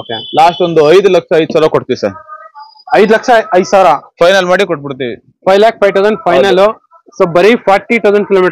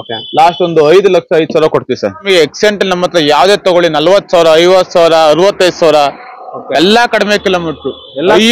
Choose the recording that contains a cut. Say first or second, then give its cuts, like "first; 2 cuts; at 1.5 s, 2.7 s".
second; 1 cut; at 2.2 s